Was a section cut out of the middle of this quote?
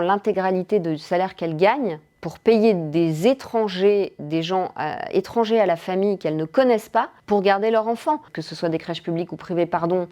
yes; 1 cut; at 8.4 s

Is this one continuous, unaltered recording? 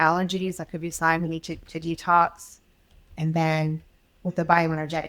no; 1 cut; at 3.2 s

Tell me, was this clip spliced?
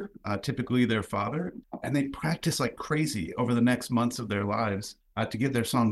yes; 2 cuts; at 1.6 s, 5.0 s

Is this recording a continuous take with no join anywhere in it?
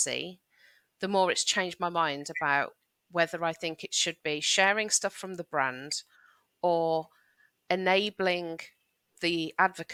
yes; 0 cuts

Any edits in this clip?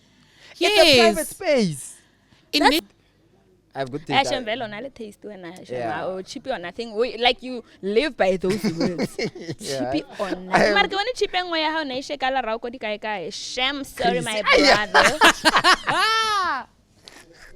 yes; 1 cut; at 2.8 s

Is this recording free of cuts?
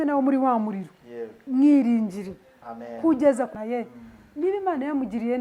no; 1 cut; at 3.5 s

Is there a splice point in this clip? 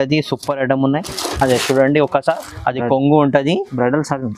no; 0 cuts

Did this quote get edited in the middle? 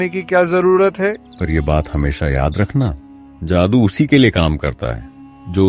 yes; 1 cut; at 1.3 s

